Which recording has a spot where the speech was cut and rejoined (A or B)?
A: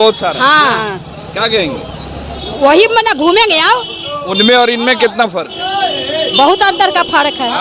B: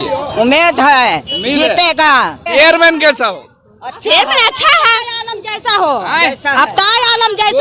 B